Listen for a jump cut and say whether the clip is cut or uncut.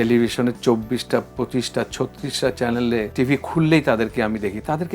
cut